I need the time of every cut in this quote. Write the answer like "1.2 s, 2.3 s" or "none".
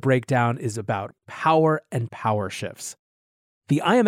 1.1 s